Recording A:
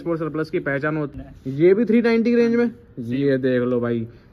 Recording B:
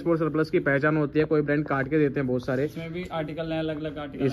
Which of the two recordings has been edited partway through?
A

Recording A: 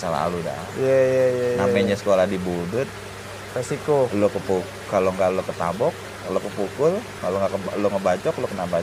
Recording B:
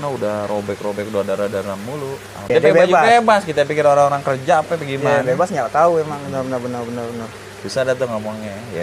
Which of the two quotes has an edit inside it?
B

